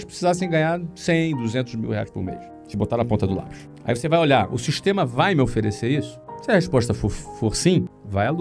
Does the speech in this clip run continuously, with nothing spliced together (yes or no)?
yes